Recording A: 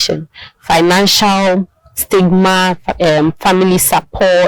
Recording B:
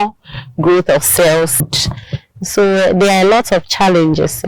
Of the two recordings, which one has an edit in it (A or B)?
B